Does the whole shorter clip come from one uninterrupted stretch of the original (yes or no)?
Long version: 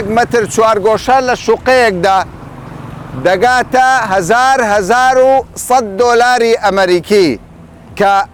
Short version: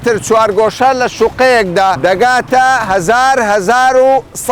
no